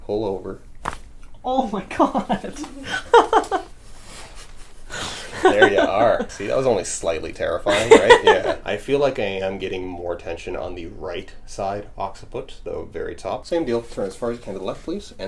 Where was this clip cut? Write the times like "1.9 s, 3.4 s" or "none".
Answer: 6.3 s, 8.6 s, 13.4 s

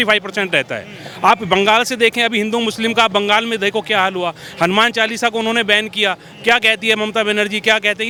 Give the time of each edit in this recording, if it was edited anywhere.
none

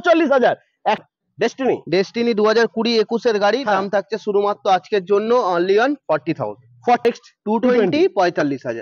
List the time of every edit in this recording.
1.0 s, 7.0 s

